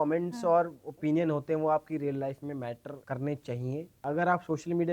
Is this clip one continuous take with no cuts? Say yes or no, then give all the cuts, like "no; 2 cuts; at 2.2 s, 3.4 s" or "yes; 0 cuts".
no; 2 cuts; at 2.9 s, 3.9 s